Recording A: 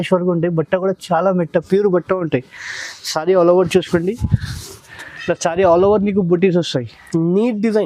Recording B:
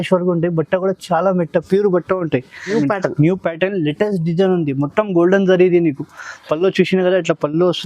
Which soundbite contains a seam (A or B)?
B